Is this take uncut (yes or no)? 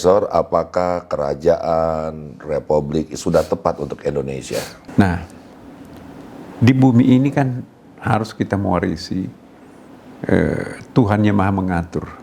no